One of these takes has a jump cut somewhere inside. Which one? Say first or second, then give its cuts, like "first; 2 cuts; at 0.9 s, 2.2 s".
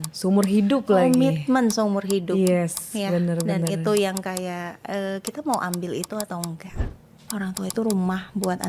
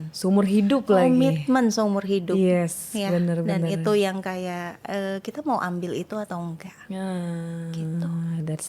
first; 1 cut; at 6.8 s